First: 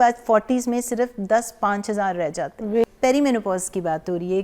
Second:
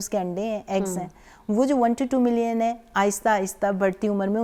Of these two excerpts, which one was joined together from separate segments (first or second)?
first